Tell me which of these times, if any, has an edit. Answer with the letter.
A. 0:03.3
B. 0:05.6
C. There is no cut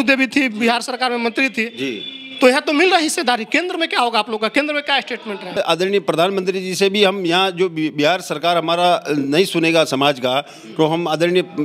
B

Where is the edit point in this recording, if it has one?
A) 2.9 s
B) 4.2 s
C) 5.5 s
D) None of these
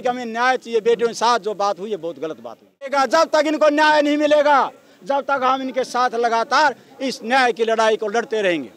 A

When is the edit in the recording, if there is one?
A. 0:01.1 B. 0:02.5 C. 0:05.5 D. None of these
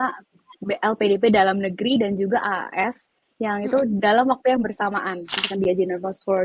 C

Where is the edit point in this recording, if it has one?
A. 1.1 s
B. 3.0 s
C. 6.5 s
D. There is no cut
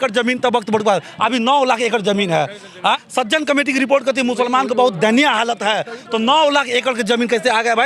B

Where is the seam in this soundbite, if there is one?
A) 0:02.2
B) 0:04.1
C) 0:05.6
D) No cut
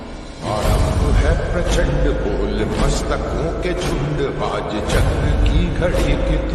D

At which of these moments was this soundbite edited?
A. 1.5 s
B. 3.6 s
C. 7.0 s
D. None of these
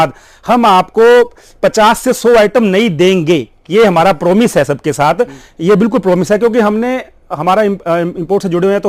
D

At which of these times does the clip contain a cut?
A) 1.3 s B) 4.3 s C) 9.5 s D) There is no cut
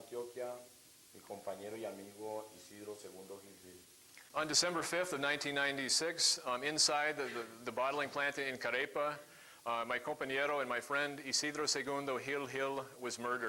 B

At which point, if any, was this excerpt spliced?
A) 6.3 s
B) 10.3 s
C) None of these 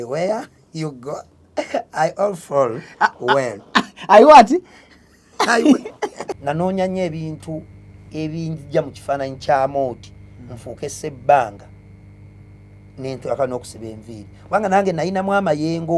A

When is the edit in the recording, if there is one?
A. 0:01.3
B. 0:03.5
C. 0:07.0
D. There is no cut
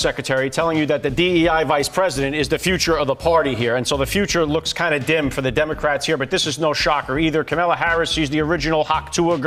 D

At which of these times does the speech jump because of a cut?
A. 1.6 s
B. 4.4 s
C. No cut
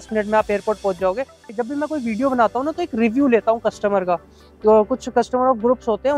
A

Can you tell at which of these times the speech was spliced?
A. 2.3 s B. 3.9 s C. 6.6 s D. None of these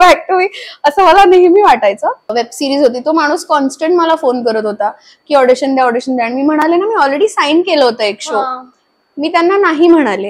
A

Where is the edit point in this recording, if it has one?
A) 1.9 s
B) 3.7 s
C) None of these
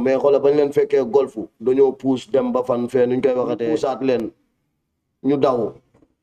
B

